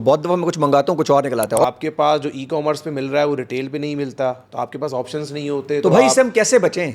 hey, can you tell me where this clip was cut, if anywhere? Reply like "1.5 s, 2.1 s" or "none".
1.6 s